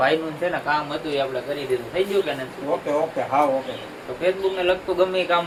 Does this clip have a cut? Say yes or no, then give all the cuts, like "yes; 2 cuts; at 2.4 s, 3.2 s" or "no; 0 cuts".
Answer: no; 0 cuts